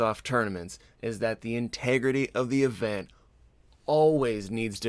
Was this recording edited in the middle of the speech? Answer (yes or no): no